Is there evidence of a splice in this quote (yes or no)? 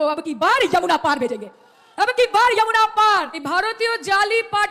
yes